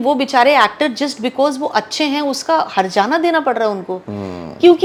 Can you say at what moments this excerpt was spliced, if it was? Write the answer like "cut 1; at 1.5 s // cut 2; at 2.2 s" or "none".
none